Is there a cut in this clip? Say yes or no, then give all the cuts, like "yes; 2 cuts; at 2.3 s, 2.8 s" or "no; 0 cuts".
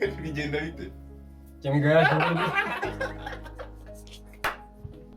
no; 0 cuts